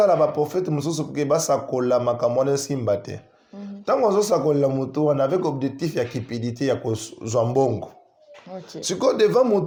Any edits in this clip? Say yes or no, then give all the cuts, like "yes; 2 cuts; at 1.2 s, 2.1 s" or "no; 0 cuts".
no; 0 cuts